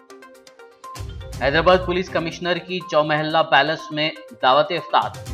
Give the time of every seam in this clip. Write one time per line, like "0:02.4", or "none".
0:01.4

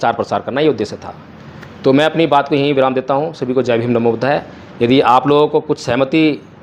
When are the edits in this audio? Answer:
none

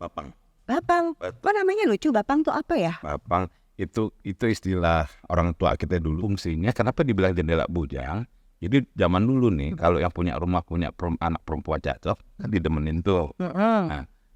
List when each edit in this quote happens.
0:06.2

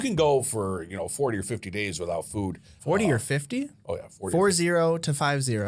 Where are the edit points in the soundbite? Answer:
0:02.7

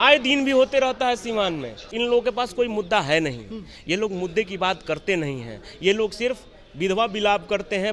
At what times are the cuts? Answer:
0:01.9

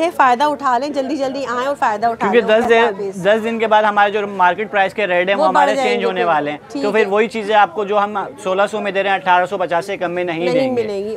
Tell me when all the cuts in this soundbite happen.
none

